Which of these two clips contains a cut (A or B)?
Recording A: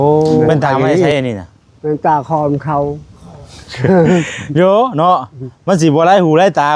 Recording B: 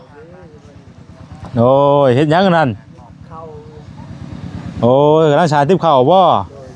A